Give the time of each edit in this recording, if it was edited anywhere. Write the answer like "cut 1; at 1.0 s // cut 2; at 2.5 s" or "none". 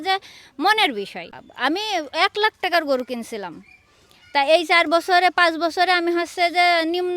cut 1; at 1.4 s